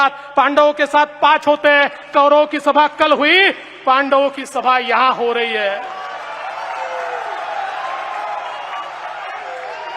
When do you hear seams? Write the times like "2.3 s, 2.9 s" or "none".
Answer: none